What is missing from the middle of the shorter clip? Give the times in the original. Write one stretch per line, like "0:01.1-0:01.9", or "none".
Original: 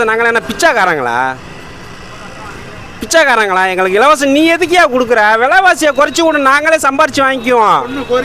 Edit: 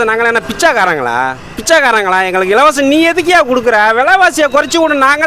0:01.5-0:02.9